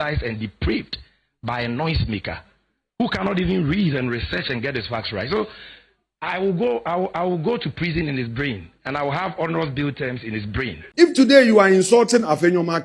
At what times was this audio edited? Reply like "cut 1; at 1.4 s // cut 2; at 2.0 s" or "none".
cut 1; at 10.8 s